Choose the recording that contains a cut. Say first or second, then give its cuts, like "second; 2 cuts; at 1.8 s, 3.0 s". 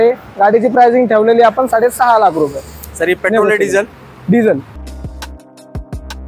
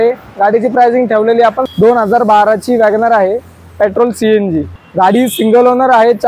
second; 2 cuts; at 1.6 s, 4.8 s